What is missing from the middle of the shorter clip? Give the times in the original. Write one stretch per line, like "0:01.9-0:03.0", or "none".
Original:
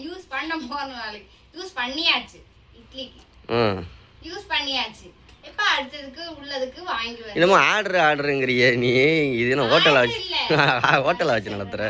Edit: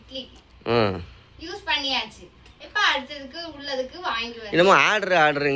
none